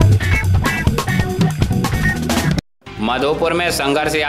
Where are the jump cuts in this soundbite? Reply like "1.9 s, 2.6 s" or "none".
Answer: 2.6 s